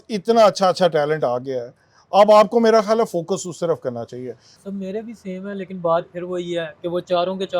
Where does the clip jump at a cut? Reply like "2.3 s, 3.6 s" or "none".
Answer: 4.6 s